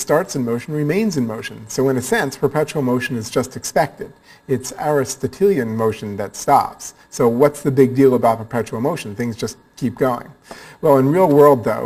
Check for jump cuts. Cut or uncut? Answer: uncut